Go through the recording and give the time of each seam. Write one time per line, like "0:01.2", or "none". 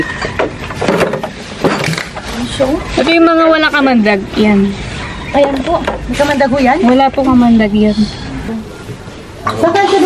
0:08.5